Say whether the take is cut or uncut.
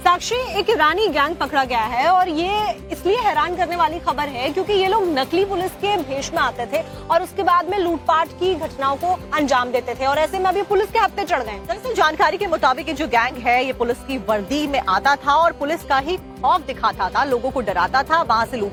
uncut